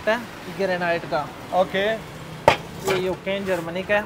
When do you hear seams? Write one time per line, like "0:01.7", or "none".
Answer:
none